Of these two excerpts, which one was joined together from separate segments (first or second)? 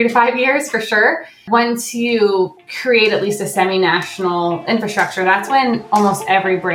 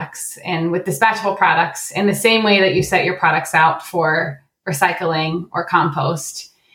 first